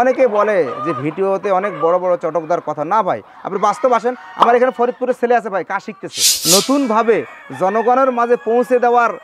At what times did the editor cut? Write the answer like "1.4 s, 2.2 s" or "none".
6.3 s